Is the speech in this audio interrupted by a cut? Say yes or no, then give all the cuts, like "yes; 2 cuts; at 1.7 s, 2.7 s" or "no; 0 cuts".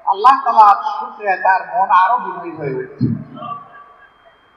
no; 0 cuts